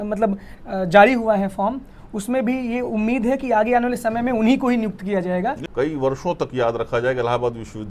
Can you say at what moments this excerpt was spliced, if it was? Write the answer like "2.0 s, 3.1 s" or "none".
5.6 s